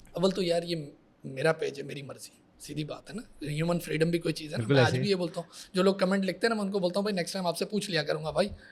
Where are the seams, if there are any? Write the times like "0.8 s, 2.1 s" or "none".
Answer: none